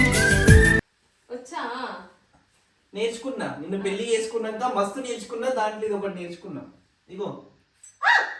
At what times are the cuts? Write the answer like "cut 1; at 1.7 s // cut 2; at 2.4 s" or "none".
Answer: cut 1; at 0.9 s